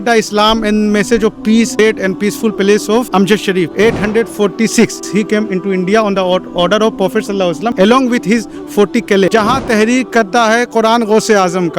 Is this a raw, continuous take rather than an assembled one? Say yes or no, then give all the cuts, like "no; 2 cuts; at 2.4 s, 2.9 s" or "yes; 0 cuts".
no; 4 cuts; at 1.8 s, 3.7 s, 5.0 s, 9.3 s